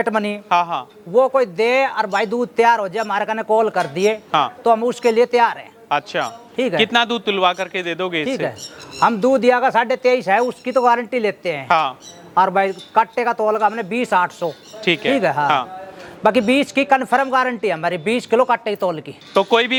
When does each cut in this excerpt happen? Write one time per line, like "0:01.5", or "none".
none